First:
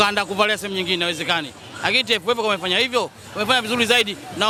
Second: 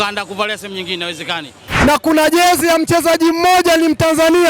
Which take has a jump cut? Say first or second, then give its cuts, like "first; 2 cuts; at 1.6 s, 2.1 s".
second; 1 cut; at 1.7 s